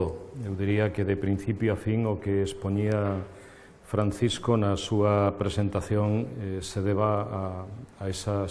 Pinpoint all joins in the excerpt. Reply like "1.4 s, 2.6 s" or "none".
none